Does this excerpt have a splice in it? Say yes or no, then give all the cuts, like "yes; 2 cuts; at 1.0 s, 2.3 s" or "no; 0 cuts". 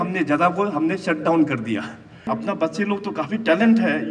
yes; 1 cut; at 2.3 s